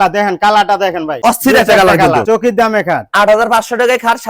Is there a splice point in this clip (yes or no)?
yes